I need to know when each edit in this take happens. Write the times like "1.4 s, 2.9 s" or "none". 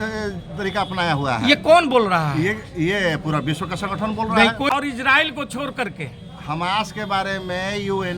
4.7 s